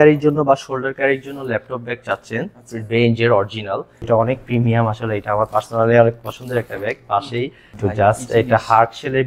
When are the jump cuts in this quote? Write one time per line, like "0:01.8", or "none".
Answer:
0:03.9
0:07.6